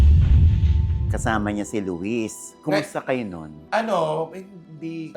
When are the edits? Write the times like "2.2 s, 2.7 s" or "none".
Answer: 1.1 s